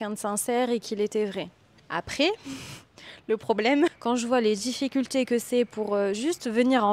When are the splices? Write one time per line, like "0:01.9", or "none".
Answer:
0:04.0